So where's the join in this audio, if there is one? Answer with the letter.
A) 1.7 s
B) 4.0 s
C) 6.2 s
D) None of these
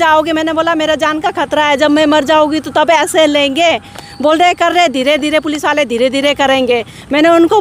D